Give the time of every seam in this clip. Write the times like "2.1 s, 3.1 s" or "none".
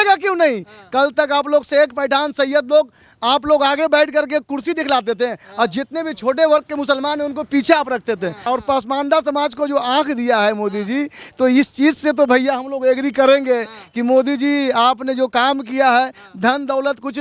8.4 s

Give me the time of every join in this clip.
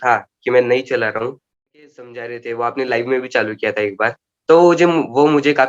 1.9 s

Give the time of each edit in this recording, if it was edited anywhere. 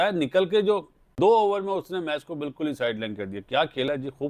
1.0 s

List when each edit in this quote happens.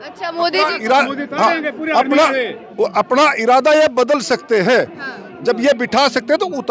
none

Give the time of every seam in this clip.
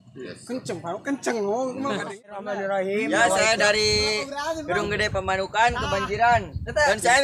2.5 s

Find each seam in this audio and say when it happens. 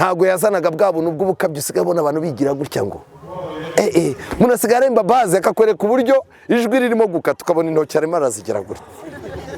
none

